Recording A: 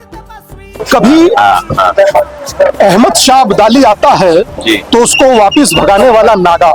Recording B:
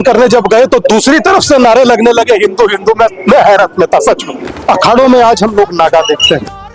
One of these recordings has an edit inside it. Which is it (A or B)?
B